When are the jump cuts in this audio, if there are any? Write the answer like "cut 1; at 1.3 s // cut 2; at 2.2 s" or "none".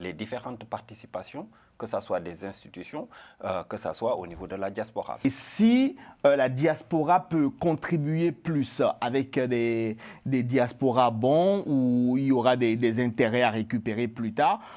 cut 1; at 5.2 s